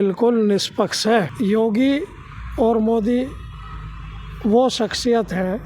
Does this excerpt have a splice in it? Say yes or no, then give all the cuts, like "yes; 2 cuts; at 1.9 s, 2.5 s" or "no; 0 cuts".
yes; 1 cut; at 1.3 s